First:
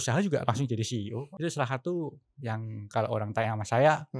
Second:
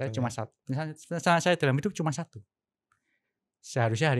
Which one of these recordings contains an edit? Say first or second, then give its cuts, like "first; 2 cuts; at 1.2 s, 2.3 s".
first; 1 cut; at 1.3 s